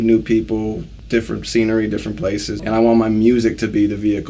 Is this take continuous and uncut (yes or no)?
no